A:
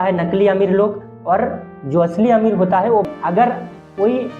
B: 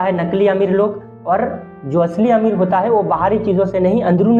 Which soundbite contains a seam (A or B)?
A